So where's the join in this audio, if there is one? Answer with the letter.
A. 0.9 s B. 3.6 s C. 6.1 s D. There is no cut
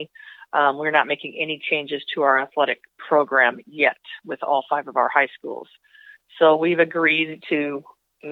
D